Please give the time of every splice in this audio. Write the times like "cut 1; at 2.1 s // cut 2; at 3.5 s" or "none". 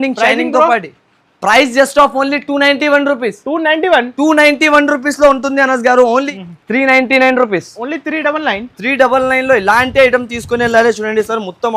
cut 1; at 6.3 s